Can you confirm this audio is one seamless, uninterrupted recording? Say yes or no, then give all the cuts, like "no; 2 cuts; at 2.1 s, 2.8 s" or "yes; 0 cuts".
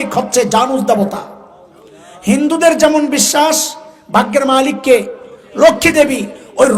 yes; 0 cuts